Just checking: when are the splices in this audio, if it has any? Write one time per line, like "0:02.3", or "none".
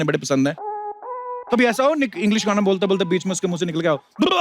0:01.0